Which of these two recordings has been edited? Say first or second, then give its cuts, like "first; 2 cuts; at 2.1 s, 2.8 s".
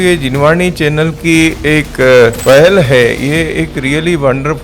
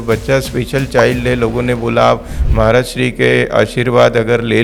first; 1 cut; at 2.4 s